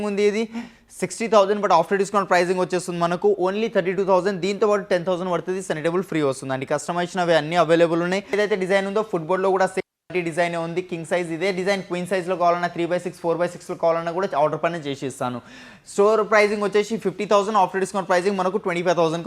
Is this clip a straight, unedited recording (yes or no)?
no